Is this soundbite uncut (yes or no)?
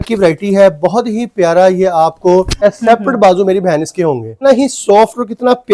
no